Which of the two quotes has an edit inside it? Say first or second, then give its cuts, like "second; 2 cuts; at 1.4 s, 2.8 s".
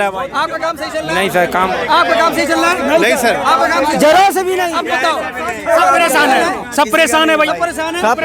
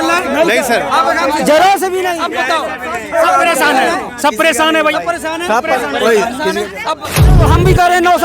second; 1 cut; at 7.4 s